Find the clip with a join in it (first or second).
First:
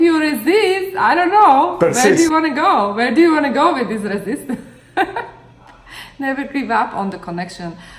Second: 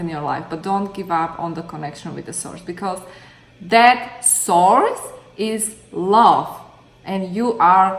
first